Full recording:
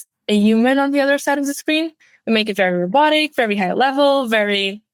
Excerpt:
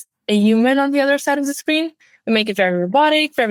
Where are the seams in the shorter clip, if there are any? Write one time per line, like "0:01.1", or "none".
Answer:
none